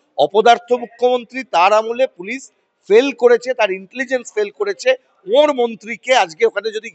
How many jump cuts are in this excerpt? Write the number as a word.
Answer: zero